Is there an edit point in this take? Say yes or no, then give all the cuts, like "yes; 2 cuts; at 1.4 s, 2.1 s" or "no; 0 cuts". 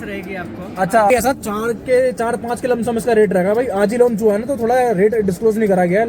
yes; 1 cut; at 1.1 s